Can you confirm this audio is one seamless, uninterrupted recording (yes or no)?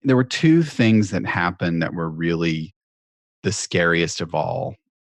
yes